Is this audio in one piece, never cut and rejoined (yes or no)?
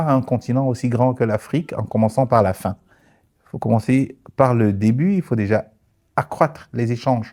yes